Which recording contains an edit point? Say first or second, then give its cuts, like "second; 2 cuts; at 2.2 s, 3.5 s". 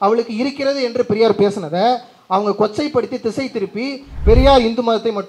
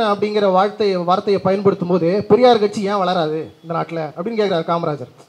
first; 1 cut; at 4.1 s